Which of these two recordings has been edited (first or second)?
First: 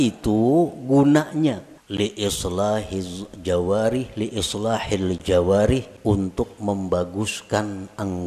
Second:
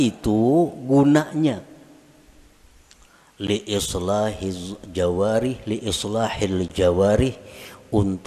first